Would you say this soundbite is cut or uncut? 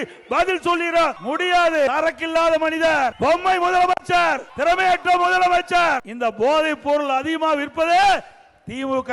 cut